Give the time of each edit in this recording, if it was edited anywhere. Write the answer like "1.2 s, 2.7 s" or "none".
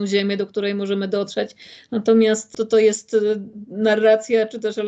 2.5 s